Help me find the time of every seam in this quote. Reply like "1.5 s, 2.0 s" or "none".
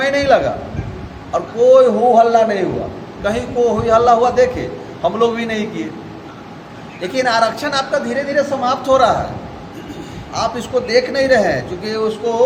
none